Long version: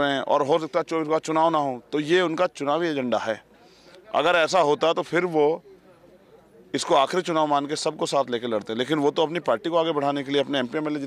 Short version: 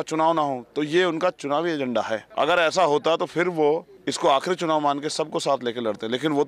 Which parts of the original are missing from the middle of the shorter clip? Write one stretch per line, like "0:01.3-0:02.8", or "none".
0:03.4-0:04.0
0:05.7-0:06.6